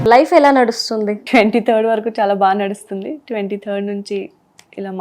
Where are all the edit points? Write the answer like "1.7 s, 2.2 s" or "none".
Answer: 1.2 s

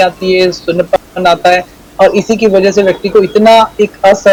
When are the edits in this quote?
none

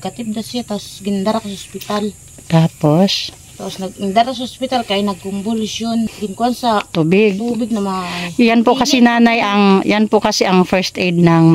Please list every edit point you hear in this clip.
6.2 s

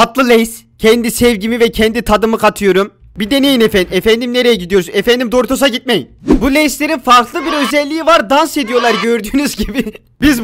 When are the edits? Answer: 6.2 s

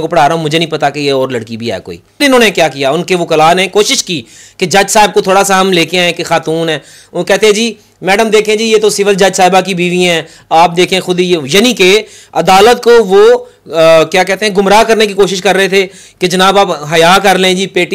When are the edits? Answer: 2.2 s

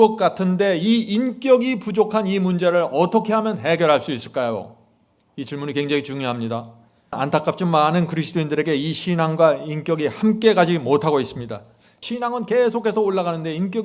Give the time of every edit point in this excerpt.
7.2 s, 12.0 s

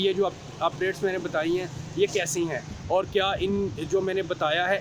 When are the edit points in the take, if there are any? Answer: none

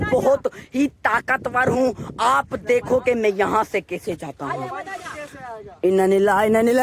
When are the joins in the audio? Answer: 3.8 s

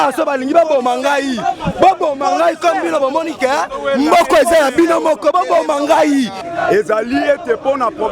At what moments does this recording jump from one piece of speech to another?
6.4 s

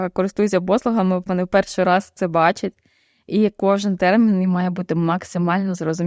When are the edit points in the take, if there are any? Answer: 1.2 s

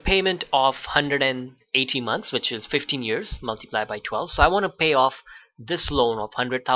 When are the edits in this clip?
1.7 s

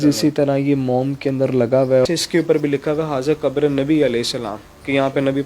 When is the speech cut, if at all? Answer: 2.1 s

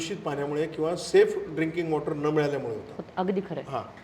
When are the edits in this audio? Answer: none

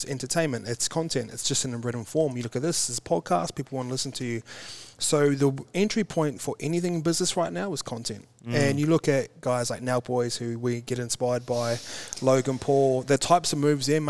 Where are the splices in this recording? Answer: none

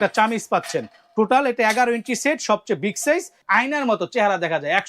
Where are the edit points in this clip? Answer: 3.4 s

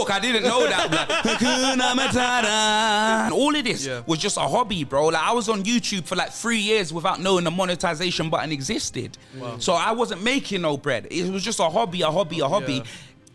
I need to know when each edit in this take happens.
3.3 s

